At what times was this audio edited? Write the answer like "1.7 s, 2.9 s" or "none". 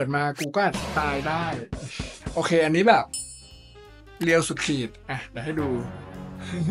none